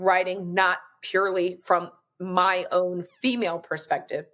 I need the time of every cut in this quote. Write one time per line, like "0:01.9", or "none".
none